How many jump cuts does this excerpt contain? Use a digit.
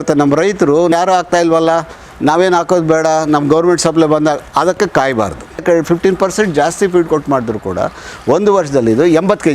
2